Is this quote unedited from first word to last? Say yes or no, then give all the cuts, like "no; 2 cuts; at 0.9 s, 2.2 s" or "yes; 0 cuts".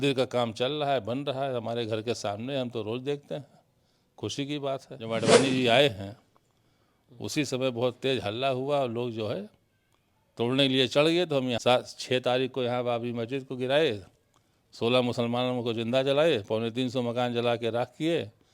no; 2 cuts; at 4.9 s, 11.6 s